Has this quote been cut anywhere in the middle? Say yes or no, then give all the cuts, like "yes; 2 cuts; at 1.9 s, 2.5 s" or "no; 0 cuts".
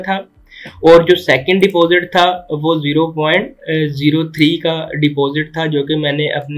no; 0 cuts